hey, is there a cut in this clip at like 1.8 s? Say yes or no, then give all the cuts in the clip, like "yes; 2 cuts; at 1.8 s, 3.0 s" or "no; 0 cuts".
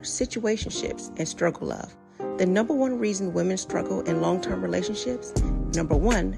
no; 0 cuts